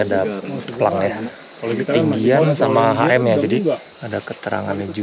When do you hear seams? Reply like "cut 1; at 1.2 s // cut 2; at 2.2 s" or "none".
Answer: cut 1; at 1.3 s // cut 2; at 3.9 s